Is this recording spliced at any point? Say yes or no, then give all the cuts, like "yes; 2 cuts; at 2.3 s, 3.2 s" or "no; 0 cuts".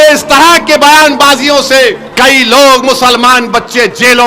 yes; 1 cut; at 2.0 s